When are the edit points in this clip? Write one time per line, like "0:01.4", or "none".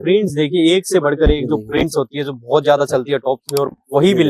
none